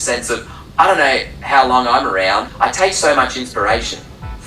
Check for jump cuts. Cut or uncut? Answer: cut